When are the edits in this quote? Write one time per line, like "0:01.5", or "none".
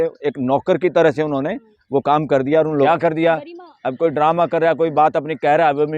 0:02.7